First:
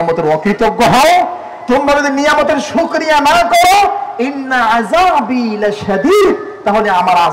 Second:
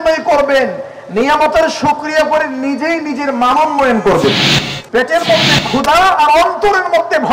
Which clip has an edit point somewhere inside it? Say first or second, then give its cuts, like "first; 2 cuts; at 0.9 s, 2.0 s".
second; 1 cut; at 4.8 s